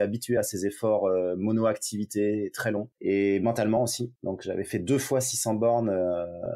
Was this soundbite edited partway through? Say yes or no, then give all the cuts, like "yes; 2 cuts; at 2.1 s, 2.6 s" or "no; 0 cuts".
yes; 2 cuts; at 2.9 s, 4.1 s